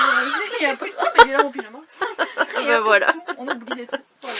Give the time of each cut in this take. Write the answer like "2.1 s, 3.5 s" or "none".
none

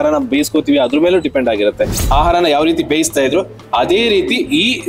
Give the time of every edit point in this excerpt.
1.9 s

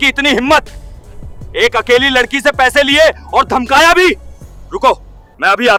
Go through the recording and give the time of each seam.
none

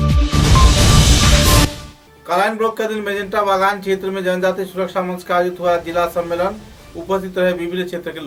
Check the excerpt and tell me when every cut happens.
none

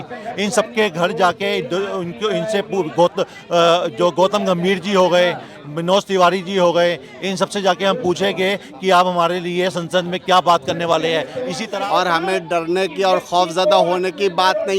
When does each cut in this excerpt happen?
11.6 s

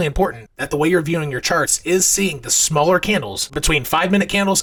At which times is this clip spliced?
none

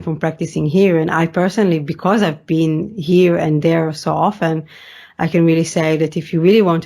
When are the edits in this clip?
none

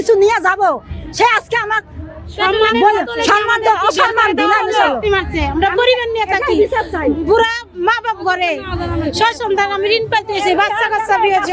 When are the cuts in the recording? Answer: none

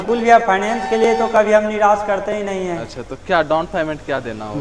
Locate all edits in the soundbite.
none

